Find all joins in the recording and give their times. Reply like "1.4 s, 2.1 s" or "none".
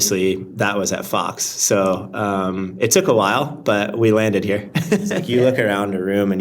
5.2 s